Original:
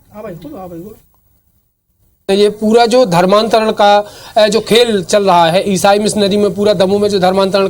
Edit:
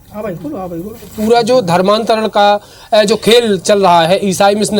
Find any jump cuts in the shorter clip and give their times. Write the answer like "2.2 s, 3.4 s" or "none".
1.1 s